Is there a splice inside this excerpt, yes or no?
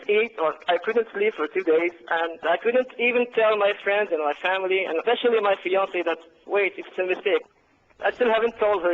yes